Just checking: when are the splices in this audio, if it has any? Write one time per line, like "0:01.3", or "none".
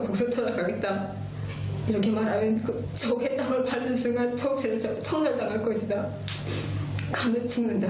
0:04.6